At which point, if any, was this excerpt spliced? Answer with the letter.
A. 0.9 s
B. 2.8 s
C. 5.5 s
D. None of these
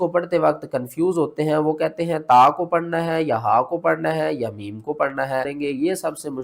C